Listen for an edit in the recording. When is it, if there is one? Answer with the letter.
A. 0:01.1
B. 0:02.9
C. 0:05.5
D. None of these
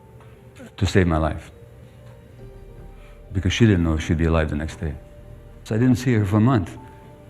C